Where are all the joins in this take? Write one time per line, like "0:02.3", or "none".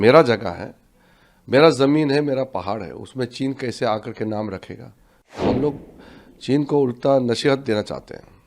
0:05.4